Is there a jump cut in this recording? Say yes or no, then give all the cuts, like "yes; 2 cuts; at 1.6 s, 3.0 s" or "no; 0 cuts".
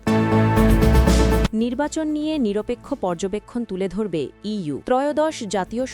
yes; 2 cuts; at 1.5 s, 4.8 s